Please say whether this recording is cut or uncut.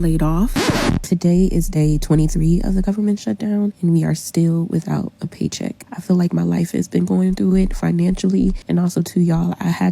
cut